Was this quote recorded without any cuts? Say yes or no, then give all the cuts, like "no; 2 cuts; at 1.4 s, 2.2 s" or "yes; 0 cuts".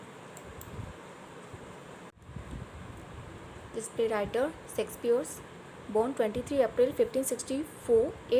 no; 1 cut; at 2.1 s